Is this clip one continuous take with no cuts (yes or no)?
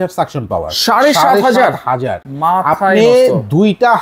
yes